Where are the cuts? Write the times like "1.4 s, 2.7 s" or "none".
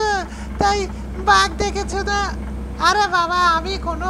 none